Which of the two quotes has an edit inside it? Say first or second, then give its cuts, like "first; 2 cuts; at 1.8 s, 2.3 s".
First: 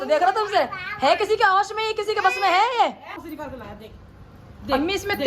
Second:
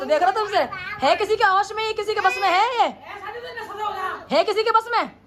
first; 1 cut; at 3.2 s